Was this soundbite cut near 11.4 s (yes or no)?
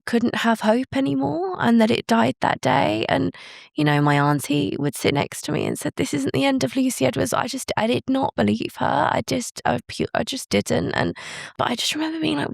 yes